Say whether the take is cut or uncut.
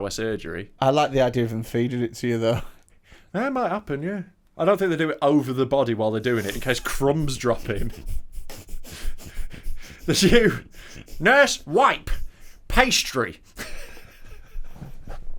uncut